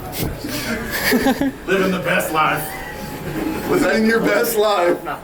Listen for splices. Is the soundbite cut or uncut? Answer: uncut